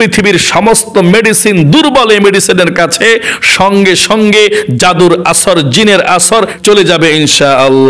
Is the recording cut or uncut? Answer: cut